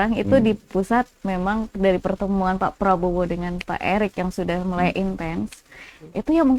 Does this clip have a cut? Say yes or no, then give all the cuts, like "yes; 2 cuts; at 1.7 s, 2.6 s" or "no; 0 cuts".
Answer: no; 0 cuts